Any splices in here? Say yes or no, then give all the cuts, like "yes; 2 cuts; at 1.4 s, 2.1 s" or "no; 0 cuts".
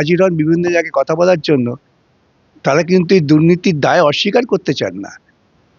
no; 0 cuts